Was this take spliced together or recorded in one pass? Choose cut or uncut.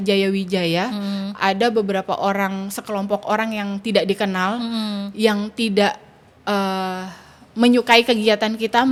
uncut